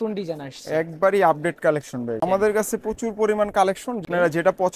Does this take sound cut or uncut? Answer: cut